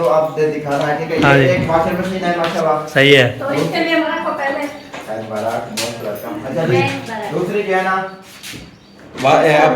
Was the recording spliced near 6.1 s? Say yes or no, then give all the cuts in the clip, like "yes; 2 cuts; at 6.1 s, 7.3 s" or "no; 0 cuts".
no; 1 cut; at 4.1 s